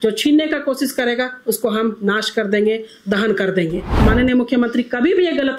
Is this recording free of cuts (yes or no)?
no